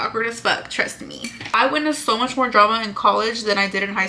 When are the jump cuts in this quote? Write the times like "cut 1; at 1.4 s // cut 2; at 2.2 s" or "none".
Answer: cut 1; at 1.5 s